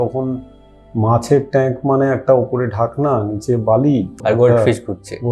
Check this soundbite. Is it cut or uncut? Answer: cut